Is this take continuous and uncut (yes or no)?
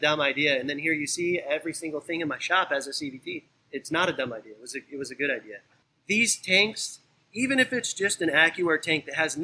no